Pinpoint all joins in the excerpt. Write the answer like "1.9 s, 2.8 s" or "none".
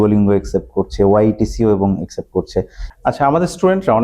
2.8 s